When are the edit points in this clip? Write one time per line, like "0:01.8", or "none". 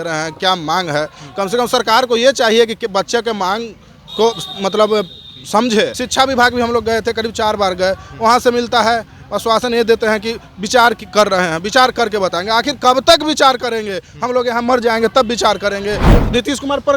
0:06.0
0:16.1